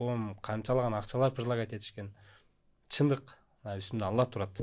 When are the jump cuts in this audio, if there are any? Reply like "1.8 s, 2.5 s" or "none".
none

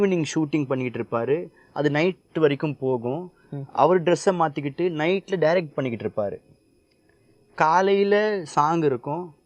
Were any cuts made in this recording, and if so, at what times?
none

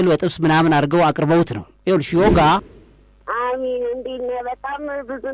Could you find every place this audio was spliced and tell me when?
2.6 s

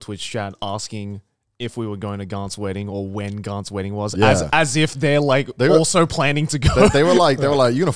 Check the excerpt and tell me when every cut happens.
none

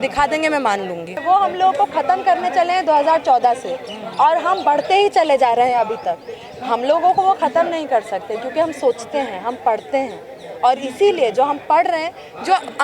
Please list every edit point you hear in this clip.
1.1 s

